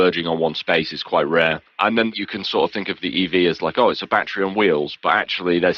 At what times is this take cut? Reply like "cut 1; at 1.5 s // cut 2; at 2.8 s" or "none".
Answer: none